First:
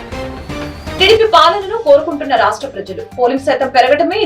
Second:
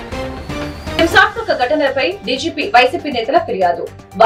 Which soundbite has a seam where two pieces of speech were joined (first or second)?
first